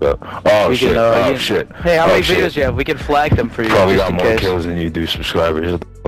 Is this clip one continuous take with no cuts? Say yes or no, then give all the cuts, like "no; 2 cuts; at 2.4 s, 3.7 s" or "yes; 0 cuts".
yes; 0 cuts